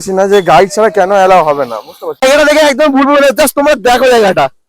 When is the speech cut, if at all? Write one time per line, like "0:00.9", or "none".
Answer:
0:02.2